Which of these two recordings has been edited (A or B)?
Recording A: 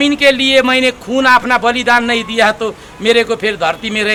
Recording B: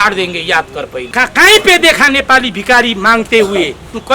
B